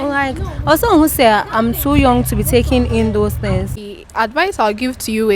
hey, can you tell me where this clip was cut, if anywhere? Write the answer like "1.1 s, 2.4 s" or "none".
3.8 s